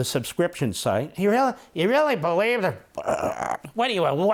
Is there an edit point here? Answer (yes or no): no